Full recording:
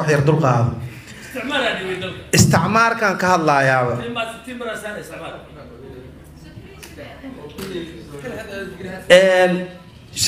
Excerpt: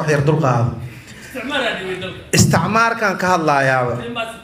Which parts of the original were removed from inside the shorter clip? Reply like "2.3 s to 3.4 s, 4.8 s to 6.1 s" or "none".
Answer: none